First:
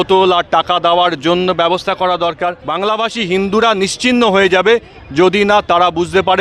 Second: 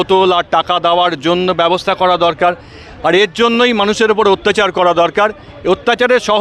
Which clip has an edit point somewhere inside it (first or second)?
first